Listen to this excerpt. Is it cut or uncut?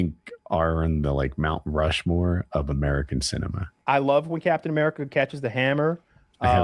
cut